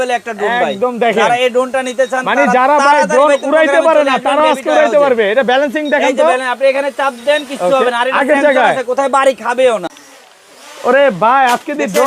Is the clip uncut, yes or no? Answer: no